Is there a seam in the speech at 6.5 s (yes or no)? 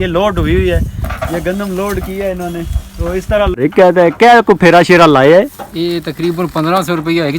no